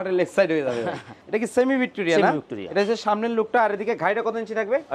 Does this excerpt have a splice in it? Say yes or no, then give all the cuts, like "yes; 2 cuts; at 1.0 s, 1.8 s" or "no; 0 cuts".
yes; 1 cut; at 1.1 s